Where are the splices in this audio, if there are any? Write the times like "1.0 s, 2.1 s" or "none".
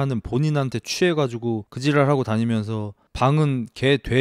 1.7 s